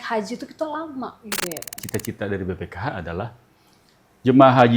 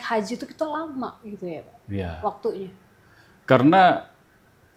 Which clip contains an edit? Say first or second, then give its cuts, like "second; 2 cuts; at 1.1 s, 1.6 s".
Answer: first; 1 cut; at 1.8 s